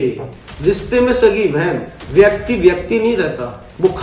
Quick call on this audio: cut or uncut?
cut